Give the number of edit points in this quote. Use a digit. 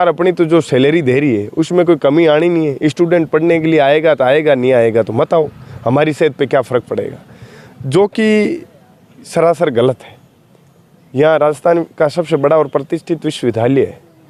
0